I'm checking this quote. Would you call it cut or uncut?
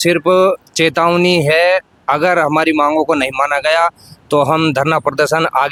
uncut